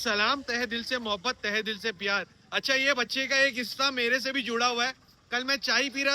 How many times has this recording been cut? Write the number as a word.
zero